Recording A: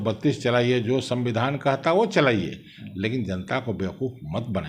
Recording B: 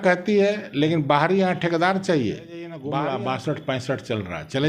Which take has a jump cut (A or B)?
B